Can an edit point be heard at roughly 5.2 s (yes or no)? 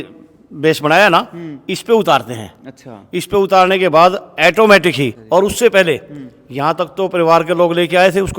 yes